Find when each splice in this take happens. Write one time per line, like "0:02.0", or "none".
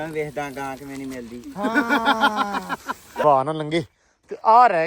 0:03.2